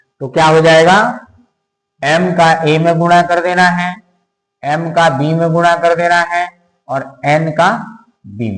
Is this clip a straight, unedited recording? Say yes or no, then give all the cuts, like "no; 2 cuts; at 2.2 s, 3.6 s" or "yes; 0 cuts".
yes; 0 cuts